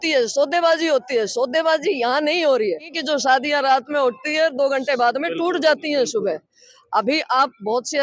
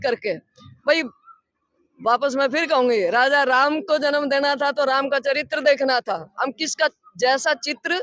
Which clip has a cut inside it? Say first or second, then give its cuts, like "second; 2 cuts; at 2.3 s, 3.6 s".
first; 1 cut; at 2.9 s